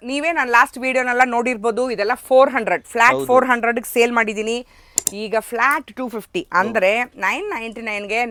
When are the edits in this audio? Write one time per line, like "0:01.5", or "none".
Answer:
none